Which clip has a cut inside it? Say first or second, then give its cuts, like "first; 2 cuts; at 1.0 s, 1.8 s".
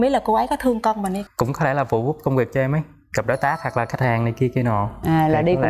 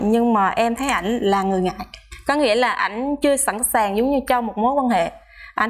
first; 1 cut; at 1.2 s